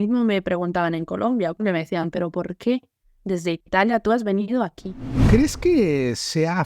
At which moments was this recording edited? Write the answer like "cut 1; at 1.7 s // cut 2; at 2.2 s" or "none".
cut 1; at 1.6 s // cut 2; at 5.2 s